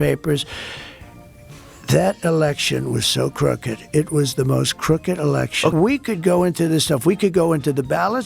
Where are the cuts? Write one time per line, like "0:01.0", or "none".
0:05.7